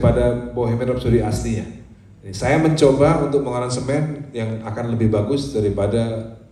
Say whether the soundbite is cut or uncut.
uncut